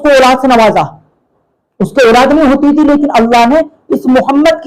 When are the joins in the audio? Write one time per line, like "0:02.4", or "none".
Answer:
none

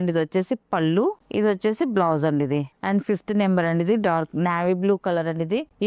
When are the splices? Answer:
none

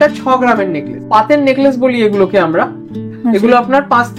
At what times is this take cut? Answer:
0:01.1
0:02.9

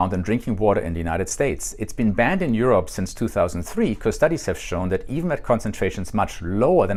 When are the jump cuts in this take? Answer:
none

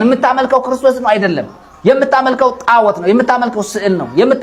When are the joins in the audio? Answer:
none

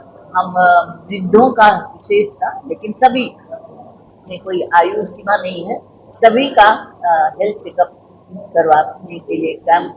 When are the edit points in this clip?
none

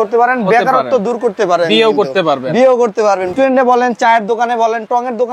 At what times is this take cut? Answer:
0:03.3

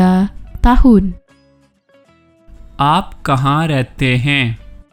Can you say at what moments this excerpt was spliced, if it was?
0:01.2
0:02.7

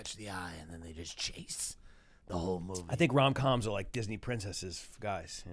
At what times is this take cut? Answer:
none

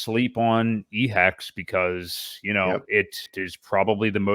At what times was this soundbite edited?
0:03.2

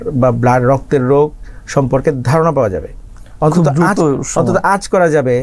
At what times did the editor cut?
none

